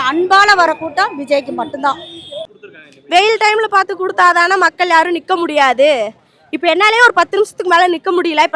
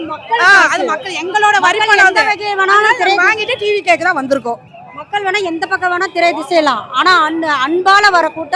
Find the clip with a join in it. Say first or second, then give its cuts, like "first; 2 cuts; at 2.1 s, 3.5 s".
first; 1 cut; at 2.4 s